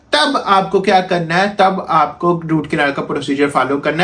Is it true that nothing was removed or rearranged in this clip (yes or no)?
yes